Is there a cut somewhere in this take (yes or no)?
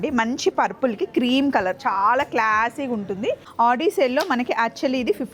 yes